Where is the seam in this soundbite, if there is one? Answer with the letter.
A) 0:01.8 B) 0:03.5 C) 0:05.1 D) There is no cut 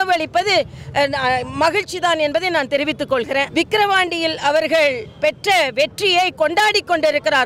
B